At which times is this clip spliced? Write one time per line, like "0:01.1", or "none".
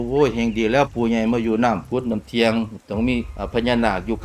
0:01.8